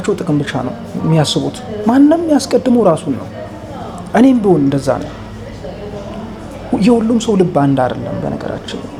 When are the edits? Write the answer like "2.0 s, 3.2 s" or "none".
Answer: none